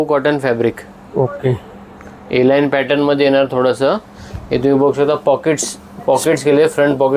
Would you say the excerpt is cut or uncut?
uncut